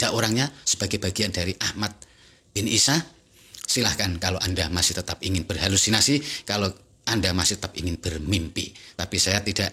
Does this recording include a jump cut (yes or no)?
no